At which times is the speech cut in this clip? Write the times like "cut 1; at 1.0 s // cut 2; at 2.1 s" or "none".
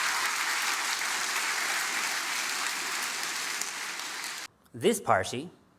cut 1; at 4.1 s